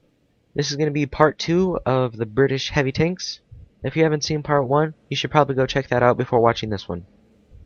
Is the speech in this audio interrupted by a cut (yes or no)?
no